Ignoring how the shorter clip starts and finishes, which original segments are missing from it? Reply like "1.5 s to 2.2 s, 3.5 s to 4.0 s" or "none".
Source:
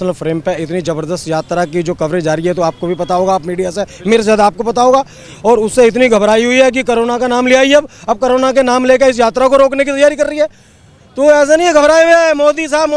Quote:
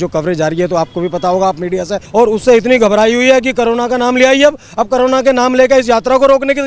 3.8 s to 5.3 s